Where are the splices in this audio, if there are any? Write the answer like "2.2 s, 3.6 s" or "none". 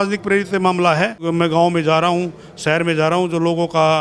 1.3 s

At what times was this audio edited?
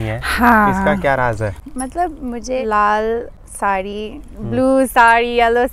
1.6 s, 2.6 s, 3.4 s

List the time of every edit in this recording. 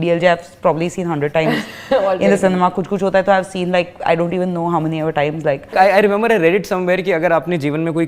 5.6 s

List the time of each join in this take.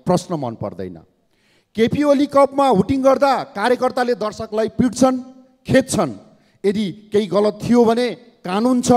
none

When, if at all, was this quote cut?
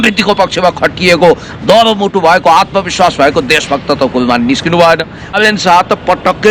5.4 s

